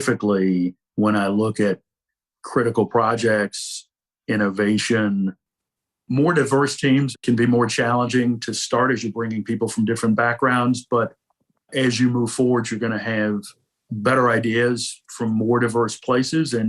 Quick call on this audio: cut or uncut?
uncut